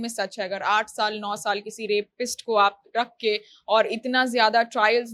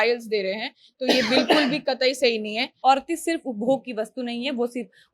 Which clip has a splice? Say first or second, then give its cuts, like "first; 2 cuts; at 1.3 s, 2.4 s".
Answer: second; 1 cut; at 2.7 s